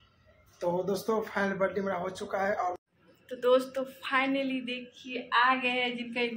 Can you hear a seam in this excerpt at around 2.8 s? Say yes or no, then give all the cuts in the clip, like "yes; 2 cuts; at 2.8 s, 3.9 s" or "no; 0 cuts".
yes; 1 cut; at 2.8 s